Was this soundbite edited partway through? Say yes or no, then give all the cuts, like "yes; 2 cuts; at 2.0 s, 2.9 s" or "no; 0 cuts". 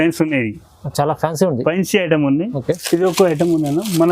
yes; 1 cut; at 2.8 s